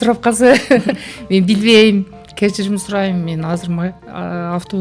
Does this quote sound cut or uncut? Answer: uncut